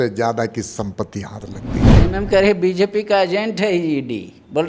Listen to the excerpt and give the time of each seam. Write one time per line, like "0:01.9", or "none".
0:01.9